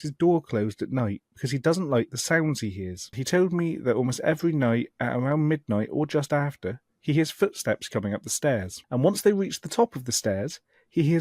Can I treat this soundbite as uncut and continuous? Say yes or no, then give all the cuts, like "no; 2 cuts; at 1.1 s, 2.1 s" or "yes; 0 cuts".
no; 2 cuts; at 3.2 s, 8.8 s